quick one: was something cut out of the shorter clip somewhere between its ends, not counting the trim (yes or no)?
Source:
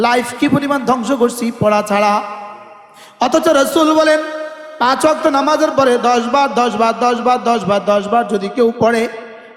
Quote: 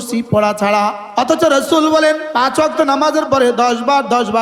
yes